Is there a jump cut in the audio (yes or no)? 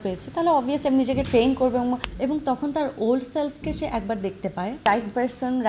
yes